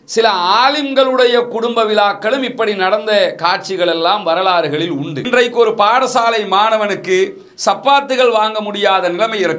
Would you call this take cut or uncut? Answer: cut